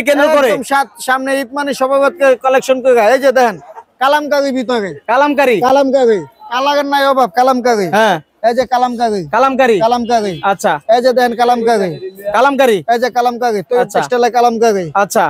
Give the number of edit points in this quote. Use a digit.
0